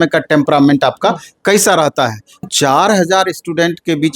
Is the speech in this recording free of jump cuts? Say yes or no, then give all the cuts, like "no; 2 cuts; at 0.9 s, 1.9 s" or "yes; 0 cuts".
no; 1 cut; at 2.5 s